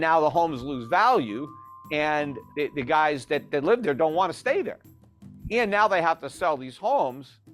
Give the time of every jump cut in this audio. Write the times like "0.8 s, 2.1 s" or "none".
2.4 s